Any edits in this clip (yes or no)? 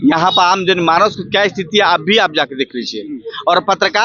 no